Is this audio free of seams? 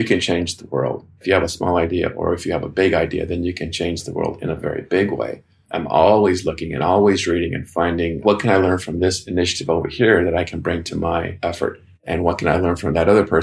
no; 2 cuts; at 1.2 s, 11.3 s

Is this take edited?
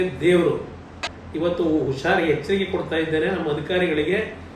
yes; 1 cut; at 1.0 s

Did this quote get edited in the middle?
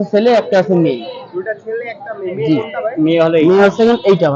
no; 0 cuts

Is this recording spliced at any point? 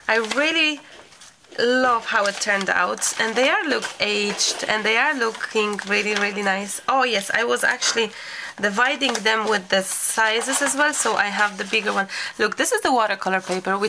no; 0 cuts

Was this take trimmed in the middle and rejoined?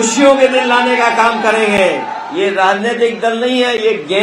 yes; 1 cut; at 2.2 s

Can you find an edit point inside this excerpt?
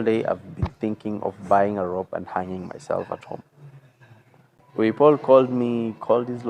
yes; 1 cut; at 4.6 s

